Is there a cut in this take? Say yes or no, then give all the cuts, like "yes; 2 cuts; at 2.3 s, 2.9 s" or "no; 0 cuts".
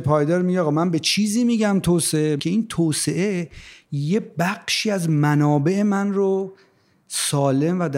yes; 1 cut; at 2.4 s